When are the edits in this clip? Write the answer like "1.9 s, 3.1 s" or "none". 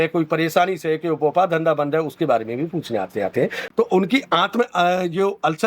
3.6 s